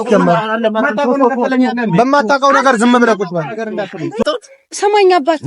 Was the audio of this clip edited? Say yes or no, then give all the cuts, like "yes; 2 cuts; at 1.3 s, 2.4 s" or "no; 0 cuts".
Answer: yes; 1 cut; at 4.2 s